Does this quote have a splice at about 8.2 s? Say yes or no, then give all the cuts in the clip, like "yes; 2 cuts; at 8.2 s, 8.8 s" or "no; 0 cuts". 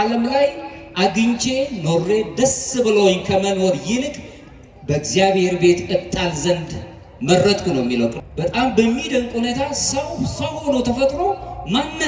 yes; 1 cut; at 8.2 s